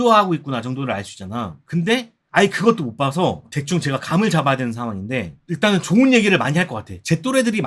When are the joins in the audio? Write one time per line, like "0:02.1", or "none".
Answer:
none